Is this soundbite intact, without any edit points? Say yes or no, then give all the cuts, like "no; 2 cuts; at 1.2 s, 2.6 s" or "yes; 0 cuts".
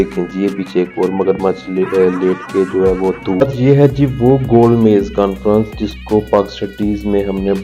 no; 1 cut; at 3.4 s